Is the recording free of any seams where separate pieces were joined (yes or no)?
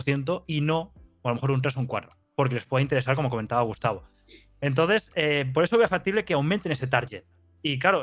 yes